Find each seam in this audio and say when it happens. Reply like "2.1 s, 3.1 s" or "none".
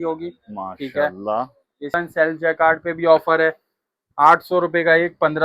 1.9 s

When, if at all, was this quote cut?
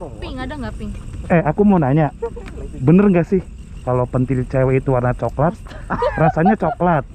1.1 s, 3.8 s

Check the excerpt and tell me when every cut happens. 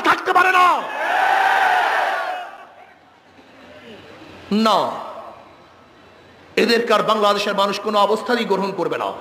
none

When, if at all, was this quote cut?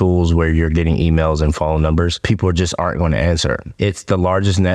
2.2 s, 3.7 s

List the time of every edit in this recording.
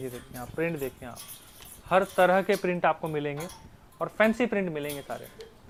none

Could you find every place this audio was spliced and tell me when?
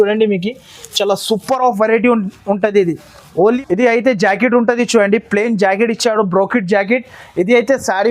3.6 s

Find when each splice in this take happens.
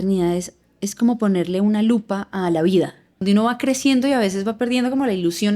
3.2 s

